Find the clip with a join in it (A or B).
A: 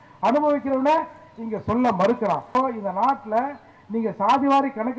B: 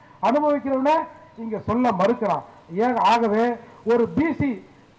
A